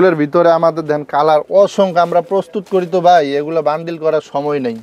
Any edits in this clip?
no; 0 cuts

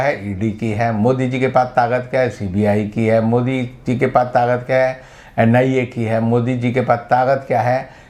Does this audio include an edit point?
no; 0 cuts

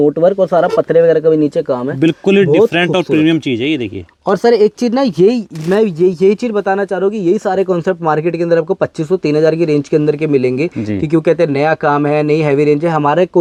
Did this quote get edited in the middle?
no; 0 cuts

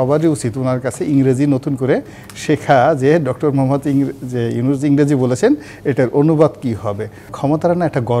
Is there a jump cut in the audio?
yes; 1 cut; at 7.3 s

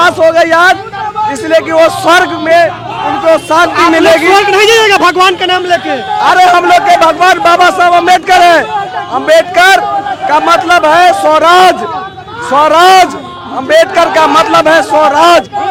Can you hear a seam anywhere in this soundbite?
no; 0 cuts

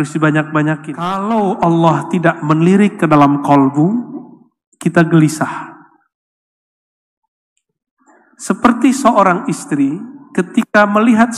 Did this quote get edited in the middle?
yes; 1 cut; at 1.2 s

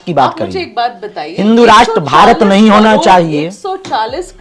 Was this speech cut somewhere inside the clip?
no; 0 cuts

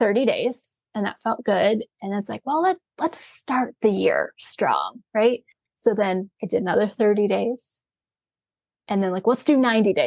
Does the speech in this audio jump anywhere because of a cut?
no; 0 cuts

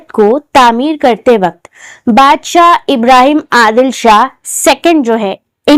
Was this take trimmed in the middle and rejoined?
no; 0 cuts

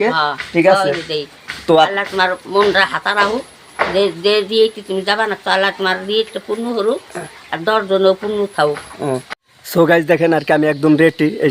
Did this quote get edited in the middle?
yes; 1 cut; at 9.4 s

